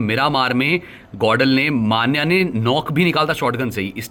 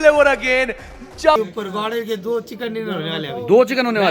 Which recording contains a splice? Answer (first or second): second